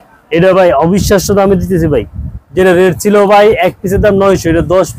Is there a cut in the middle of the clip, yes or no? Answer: no